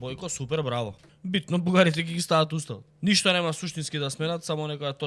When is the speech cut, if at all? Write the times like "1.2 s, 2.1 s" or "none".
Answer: 1.1 s, 2.8 s